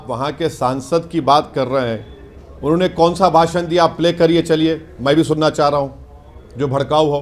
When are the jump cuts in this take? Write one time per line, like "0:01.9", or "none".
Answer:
none